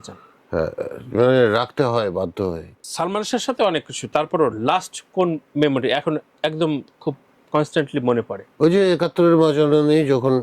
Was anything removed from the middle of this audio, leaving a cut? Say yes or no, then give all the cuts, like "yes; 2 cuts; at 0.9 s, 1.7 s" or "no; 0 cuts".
yes; 2 cuts; at 2.8 s, 7.3 s